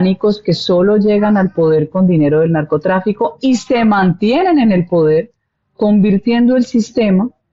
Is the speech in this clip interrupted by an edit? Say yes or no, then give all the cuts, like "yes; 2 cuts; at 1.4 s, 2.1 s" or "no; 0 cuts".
no; 0 cuts